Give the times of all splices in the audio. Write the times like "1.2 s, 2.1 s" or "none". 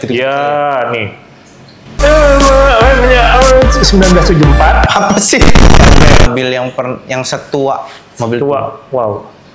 6.3 s